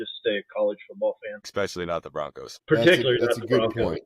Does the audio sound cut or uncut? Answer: cut